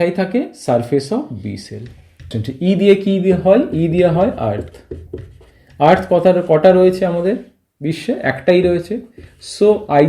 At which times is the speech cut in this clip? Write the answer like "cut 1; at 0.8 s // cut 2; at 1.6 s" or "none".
cut 1; at 2.4 s